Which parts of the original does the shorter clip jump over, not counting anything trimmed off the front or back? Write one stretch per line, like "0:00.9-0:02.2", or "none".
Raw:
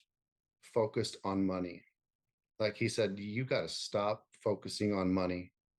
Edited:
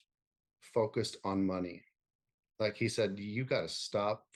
none